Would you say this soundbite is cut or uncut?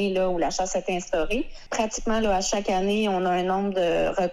cut